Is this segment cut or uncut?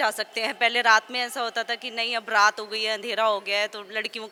uncut